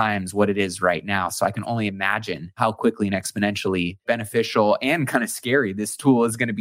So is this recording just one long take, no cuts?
no; 2 cuts; at 2.6 s, 4.0 s

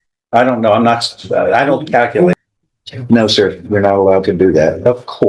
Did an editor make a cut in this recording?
yes; 1 cut; at 2.3 s

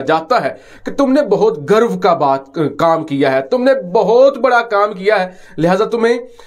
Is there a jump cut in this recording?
no; 0 cuts

